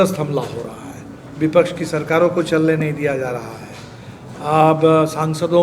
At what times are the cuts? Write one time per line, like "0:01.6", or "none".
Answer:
none

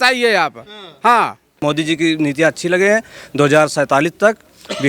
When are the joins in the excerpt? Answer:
0:01.6

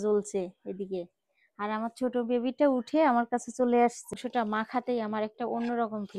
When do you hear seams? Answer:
0:04.0

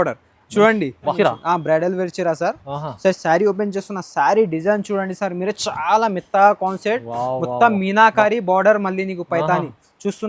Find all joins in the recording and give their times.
0:01.1

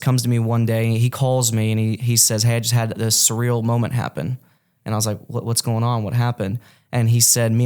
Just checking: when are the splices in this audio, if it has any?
none

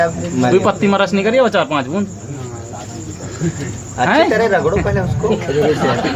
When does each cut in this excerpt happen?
none

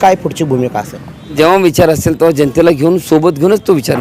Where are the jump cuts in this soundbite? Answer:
0:01.3

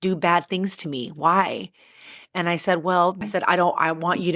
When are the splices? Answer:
0:03.2

